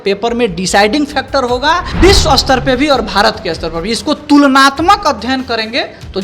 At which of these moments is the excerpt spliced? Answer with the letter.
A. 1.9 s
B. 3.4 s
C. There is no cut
A